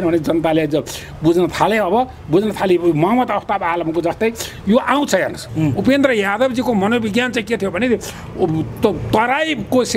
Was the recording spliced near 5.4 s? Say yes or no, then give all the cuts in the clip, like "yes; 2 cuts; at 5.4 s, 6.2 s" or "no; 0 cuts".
yes; 1 cut; at 5.4 s